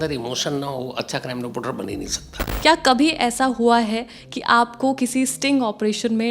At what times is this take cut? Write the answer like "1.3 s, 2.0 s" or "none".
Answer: 2.4 s